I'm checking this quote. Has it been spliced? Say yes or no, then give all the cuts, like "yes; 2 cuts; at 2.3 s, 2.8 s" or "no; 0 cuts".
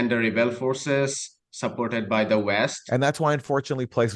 yes; 1 cut; at 2.8 s